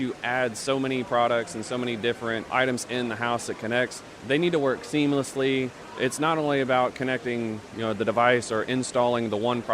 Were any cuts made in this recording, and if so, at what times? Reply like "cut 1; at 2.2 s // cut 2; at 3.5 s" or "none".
cut 1; at 2.5 s // cut 2; at 4.1 s // cut 3; at 5.8 s